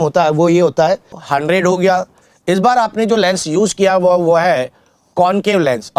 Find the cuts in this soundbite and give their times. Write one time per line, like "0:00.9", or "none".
0:01.2